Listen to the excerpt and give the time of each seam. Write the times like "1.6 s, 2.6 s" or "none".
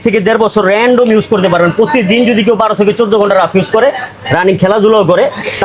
none